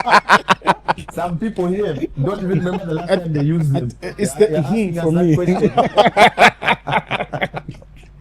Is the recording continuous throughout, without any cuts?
yes; 0 cuts

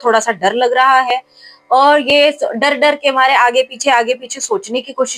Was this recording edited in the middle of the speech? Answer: no; 0 cuts

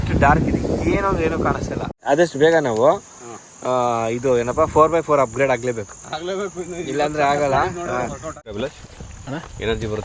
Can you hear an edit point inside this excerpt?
yes; 2 cuts; at 1.9 s, 8.4 s

